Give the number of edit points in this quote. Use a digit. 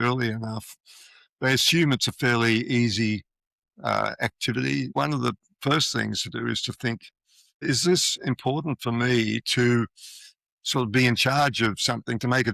2